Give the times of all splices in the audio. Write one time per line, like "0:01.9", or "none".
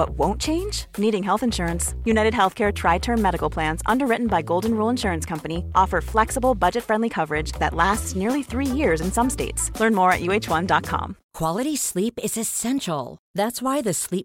0:11.2